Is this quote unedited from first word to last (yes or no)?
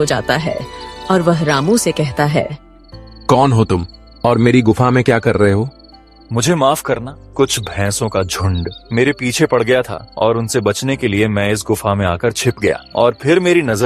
no